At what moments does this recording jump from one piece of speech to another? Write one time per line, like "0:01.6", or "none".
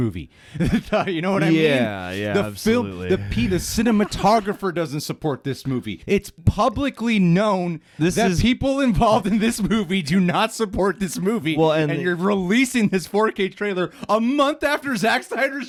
none